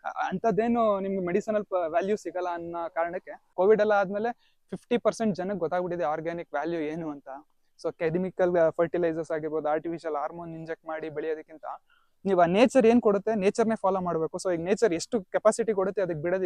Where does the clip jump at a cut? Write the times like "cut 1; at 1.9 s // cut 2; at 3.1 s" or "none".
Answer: cut 1; at 3.5 s